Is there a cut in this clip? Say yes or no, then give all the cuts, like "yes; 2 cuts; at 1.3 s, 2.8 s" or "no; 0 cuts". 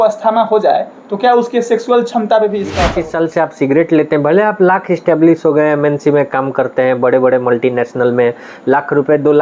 yes; 1 cut; at 2.9 s